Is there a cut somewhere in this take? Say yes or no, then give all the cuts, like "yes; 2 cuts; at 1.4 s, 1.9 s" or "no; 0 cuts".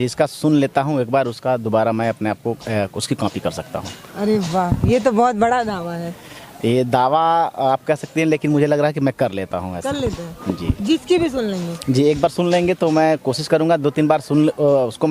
no; 0 cuts